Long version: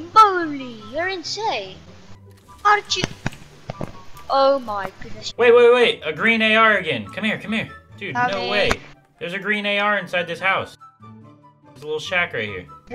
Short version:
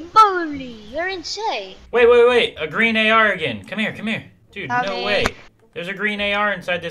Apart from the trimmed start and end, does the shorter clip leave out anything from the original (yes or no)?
yes